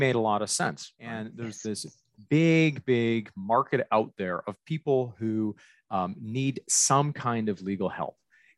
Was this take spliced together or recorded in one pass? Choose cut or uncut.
cut